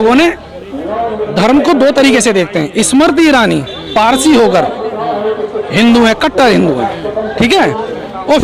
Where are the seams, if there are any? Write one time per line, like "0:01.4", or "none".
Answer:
none